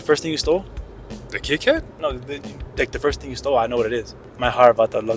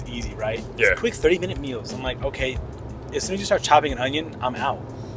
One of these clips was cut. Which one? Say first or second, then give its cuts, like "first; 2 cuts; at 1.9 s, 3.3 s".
first; 1 cut; at 4.2 s